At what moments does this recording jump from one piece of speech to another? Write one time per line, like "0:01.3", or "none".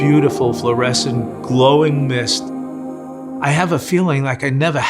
0:02.9